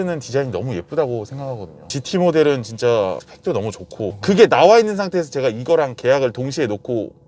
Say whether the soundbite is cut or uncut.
uncut